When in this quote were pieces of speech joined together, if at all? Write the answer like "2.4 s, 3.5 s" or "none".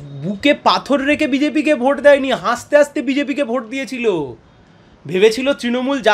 none